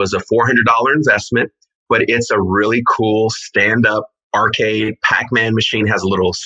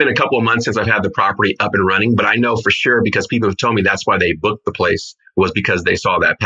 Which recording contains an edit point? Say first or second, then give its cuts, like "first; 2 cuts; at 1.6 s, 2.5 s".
first; 1 cut; at 4.2 s